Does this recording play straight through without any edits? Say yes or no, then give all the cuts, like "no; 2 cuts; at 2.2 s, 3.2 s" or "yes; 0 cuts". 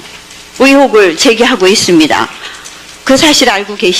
no; 1 cut; at 1.9 s